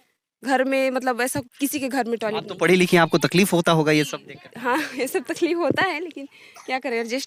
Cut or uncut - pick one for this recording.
uncut